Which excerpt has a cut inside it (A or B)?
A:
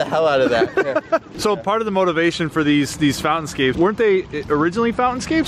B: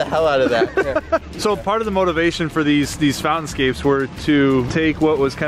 A